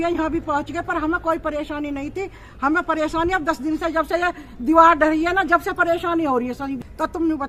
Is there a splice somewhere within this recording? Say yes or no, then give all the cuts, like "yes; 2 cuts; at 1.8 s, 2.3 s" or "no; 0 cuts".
no; 0 cuts